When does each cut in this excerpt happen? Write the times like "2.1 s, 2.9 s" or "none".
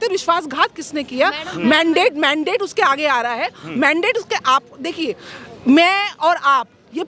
none